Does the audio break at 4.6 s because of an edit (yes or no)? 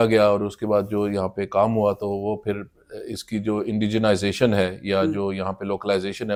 no